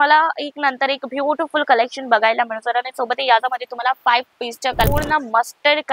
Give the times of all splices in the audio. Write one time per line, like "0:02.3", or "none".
0:04.9

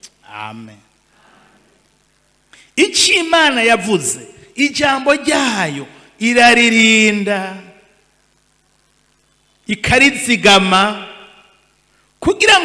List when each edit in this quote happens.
0:02.1

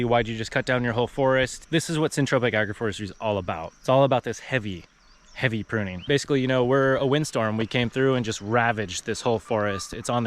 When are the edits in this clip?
0:01.6
0:03.7
0:06.0

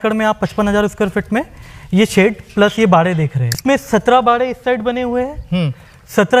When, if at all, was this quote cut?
0:03.6

